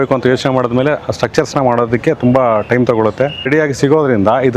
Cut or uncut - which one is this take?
cut